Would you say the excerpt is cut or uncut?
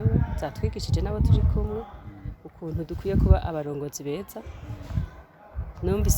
uncut